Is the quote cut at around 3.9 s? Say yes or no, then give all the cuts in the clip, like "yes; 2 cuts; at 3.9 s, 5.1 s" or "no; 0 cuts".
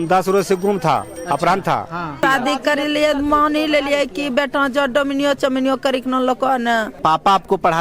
no; 2 cuts; at 2.2 s, 7.0 s